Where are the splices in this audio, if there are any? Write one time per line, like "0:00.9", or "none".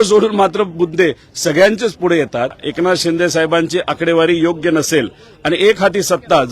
0:02.6